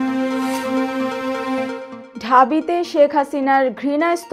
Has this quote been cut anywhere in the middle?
yes; 1 cut; at 1.9 s

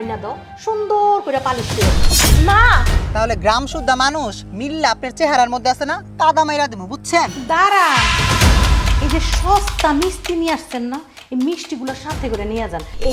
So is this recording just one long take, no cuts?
no; 2 cuts; at 3.0 s, 7.3 s

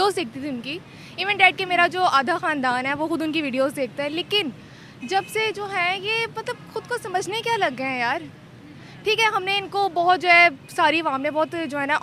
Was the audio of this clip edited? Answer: no; 0 cuts

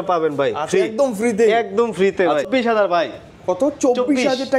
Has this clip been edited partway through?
yes; 1 cut; at 2.4 s

